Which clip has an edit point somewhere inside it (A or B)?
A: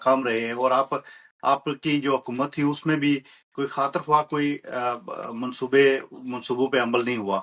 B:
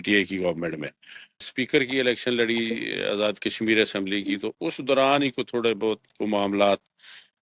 B